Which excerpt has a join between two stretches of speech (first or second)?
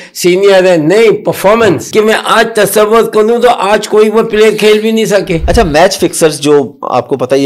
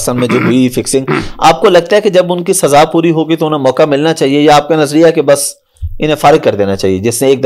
first